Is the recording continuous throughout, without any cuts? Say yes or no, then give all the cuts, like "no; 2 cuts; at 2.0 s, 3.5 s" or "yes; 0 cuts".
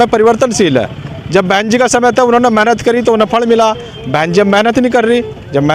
yes; 0 cuts